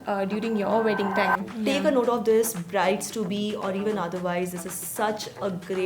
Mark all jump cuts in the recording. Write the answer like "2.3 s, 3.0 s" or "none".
1.5 s